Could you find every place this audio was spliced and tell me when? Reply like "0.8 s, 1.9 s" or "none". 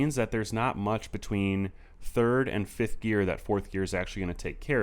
none